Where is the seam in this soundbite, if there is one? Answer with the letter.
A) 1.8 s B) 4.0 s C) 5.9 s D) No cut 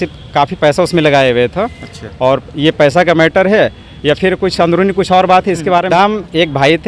C